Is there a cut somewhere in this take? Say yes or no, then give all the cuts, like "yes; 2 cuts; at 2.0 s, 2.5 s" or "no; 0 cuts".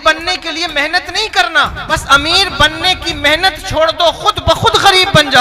yes; 1 cut; at 1.8 s